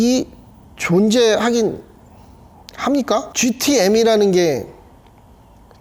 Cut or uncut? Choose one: uncut